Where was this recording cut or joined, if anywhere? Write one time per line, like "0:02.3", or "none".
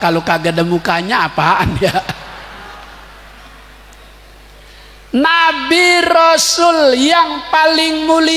none